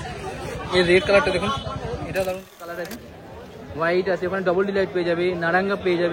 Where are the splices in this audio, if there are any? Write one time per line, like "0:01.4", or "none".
0:02.7